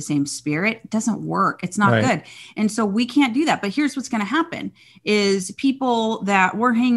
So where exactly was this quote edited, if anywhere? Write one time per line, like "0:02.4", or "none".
none

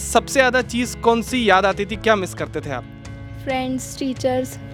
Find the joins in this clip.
none

